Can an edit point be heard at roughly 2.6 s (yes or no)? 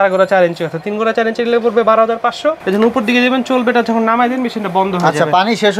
yes